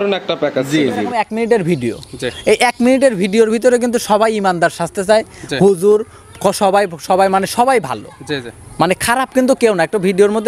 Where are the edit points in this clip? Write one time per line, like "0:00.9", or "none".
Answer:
0:01.1